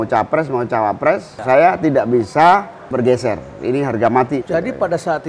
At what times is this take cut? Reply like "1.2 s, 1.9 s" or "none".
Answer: 1.3 s, 2.9 s, 4.4 s